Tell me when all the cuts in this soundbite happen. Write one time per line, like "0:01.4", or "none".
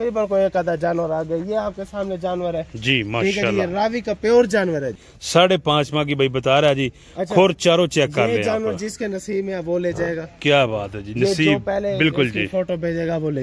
0:05.0